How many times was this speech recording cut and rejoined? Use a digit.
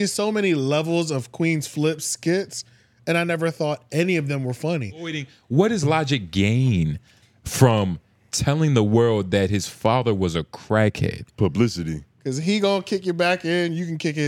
2